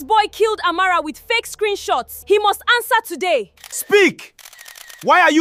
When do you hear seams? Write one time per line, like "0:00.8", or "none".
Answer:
none